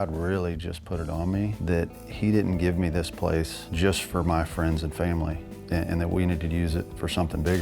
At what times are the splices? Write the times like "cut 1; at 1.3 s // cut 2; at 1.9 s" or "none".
cut 1; at 1.6 s // cut 2; at 3.6 s // cut 3; at 5.5 s